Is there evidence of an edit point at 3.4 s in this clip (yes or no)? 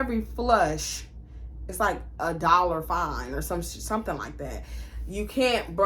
no